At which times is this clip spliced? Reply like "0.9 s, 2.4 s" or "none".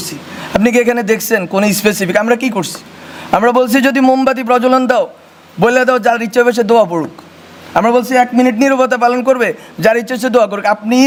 none

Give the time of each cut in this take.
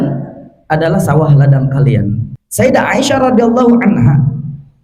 2.3 s

